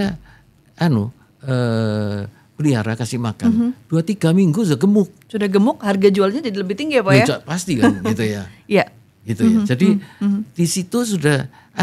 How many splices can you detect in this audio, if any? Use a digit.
0